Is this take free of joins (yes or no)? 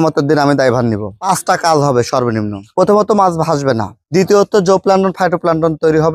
yes